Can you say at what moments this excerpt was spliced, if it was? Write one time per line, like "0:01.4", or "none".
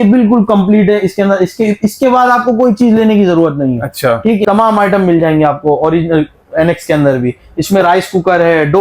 0:04.4